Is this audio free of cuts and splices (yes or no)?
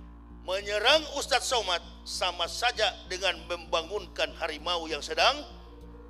yes